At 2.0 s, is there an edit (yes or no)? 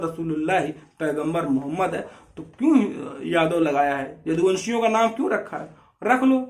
no